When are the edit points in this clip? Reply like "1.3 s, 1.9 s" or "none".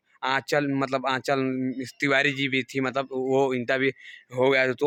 none

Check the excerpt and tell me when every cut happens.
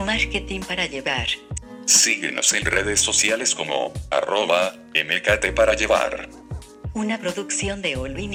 none

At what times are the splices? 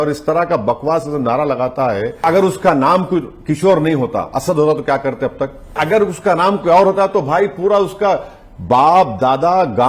2.2 s, 5.8 s

